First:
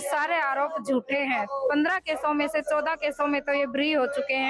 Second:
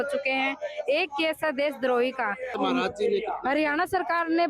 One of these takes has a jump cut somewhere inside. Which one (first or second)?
second